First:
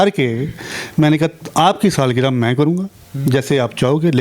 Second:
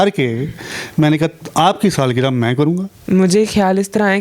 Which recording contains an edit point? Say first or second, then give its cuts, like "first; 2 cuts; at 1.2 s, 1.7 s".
second; 1 cut; at 2.9 s